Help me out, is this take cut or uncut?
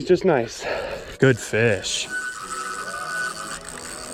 cut